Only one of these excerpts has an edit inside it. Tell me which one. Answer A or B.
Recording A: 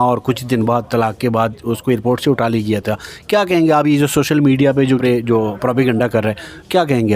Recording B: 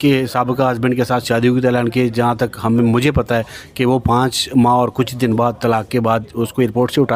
A